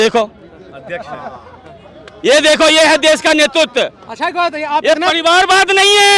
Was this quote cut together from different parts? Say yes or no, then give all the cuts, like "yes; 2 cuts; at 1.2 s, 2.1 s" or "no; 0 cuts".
no; 0 cuts